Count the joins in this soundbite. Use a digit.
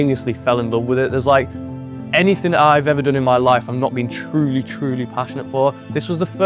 0